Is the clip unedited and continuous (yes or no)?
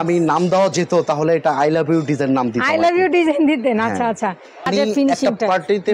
no